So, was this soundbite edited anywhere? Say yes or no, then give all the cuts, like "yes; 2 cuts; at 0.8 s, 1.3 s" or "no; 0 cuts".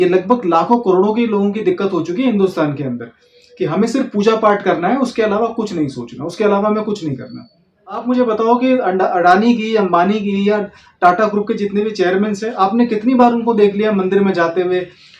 yes; 1 cut; at 8.0 s